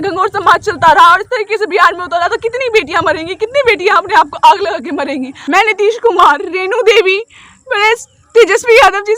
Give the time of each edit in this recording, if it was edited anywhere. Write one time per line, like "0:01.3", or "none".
0:05.4